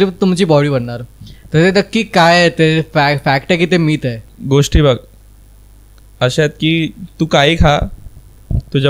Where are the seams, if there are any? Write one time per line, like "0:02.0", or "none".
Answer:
0:04.3